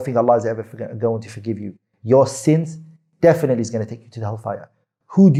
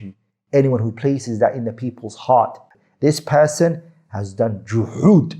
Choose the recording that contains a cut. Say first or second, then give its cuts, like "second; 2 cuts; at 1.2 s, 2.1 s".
second; 1 cut; at 2.7 s